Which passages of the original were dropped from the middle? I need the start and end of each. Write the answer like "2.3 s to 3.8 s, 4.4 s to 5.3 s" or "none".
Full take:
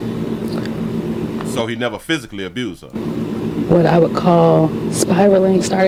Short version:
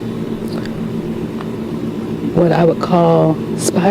1.5 s to 2.9 s